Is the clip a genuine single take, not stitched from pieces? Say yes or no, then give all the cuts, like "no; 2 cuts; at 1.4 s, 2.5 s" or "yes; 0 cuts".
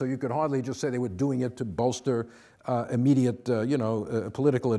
yes; 0 cuts